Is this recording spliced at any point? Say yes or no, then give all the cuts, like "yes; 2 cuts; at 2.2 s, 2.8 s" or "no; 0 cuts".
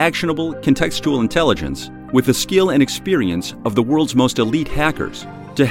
no; 0 cuts